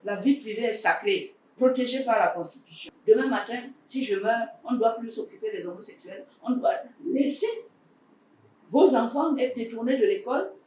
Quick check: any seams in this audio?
yes; 2 cuts; at 1.4 s, 2.9 s

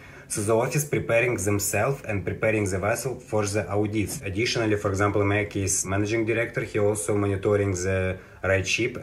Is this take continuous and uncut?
no; 2 cuts; at 4.2 s, 5.8 s

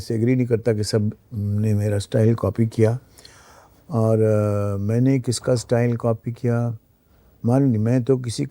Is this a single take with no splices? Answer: yes; 0 cuts

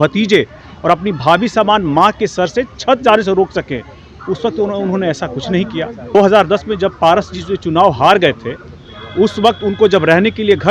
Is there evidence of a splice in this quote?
yes; 1 cut; at 6.1 s

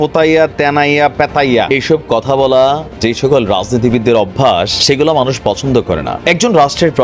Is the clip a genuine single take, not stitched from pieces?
no; 3 cuts; at 1.7 s, 4.7 s, 6.1 s

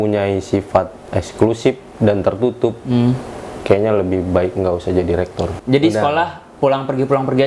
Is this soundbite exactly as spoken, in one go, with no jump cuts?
no; 1 cut; at 5.5 s

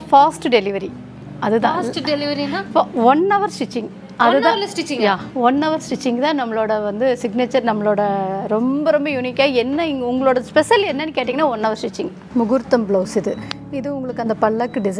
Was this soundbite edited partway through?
yes; 1 cut; at 12.2 s

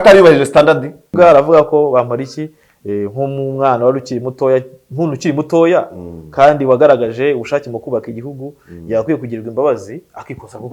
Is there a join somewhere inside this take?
yes; 1 cut; at 1.1 s

